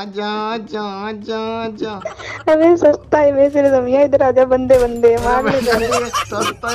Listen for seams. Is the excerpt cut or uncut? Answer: cut